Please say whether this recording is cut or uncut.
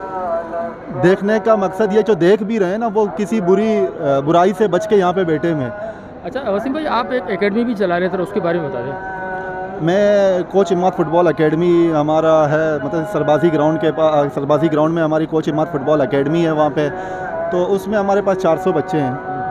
uncut